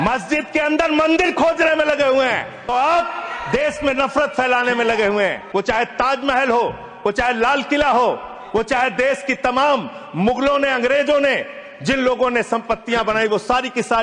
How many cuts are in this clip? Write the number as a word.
two